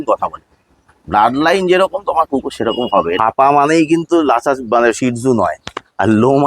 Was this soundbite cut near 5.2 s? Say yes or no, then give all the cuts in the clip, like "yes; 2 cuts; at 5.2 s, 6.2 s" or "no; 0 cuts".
no; 1 cut; at 3.2 s